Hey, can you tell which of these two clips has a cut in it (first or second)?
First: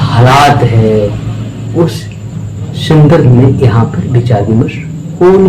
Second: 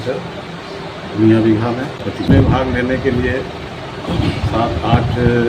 second